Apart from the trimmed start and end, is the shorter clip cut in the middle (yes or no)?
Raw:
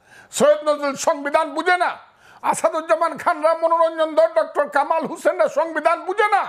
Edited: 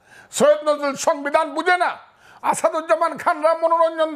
no